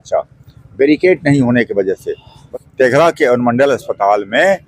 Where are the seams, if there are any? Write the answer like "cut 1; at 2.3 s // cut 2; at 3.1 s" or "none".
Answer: cut 1; at 2.5 s